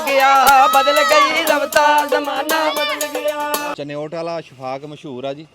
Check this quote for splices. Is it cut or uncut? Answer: cut